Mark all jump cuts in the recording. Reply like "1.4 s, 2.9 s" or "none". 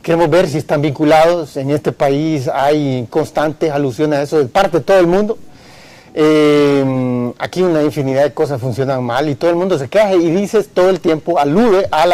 none